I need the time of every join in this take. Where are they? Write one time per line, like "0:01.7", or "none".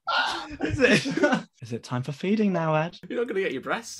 0:01.6
0:03.0